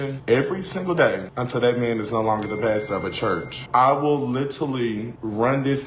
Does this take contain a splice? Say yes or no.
no